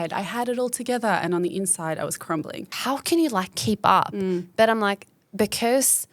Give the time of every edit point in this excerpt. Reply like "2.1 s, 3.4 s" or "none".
2.7 s

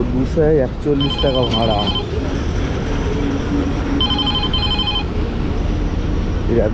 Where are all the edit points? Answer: none

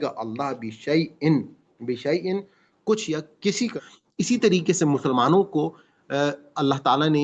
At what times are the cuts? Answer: 3.7 s

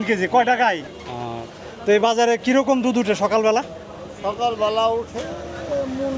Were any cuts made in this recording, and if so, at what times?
0.9 s

